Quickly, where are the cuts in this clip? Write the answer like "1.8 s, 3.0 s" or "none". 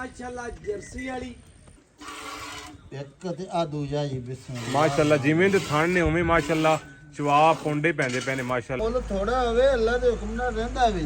1.8 s, 8.8 s